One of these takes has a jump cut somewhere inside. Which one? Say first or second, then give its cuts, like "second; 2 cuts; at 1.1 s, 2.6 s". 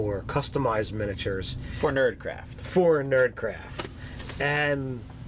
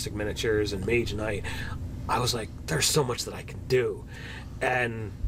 first; 1 cut; at 1.6 s